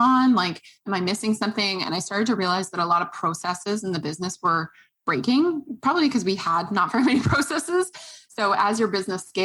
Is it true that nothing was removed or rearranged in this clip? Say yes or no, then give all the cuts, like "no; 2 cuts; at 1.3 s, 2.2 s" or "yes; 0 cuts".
yes; 0 cuts